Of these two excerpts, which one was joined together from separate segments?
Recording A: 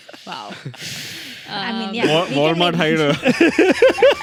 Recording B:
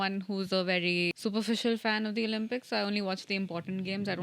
B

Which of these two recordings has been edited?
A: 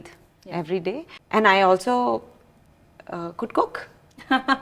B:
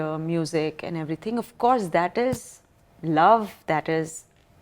A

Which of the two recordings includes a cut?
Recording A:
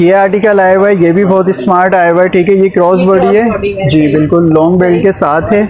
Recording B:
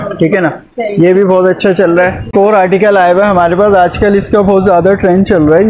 B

